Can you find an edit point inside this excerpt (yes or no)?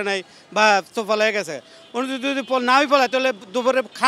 no